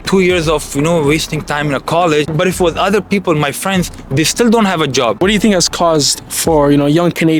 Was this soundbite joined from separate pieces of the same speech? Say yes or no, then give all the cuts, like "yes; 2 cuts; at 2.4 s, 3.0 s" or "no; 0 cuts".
yes; 2 cuts; at 2.3 s, 5.2 s